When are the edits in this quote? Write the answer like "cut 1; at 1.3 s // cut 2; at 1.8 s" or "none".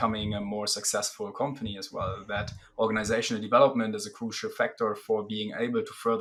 none